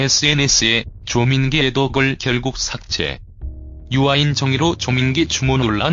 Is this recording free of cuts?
yes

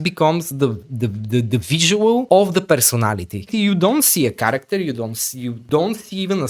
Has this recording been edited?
yes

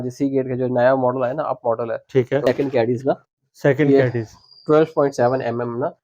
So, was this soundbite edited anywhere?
yes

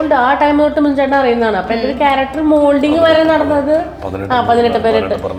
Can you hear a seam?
no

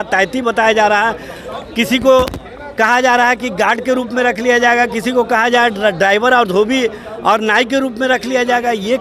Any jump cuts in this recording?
no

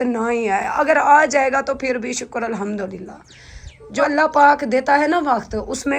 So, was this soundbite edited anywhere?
yes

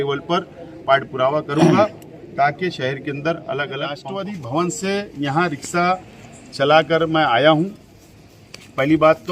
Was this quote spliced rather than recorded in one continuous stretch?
yes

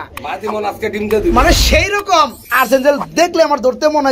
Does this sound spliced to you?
yes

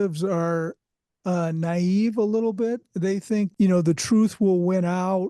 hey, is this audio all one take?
no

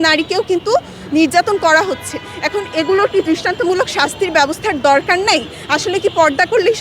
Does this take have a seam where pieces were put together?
no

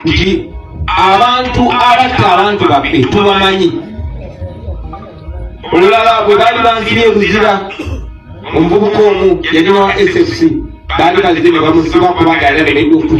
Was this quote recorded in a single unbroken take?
yes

